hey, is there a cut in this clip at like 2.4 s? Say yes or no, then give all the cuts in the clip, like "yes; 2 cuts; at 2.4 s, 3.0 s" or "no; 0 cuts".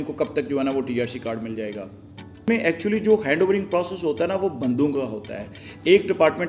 yes; 1 cut; at 2.4 s